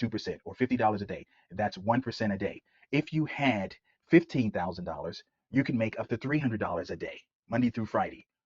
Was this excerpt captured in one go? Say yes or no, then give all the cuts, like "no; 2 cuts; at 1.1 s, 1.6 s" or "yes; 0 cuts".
no; 1 cut; at 7.3 s